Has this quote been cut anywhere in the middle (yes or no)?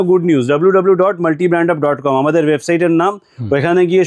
no